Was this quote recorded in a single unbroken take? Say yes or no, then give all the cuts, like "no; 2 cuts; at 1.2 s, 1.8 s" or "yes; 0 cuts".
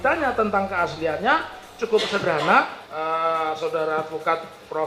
no; 1 cut; at 2.8 s